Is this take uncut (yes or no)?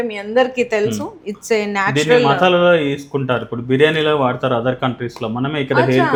yes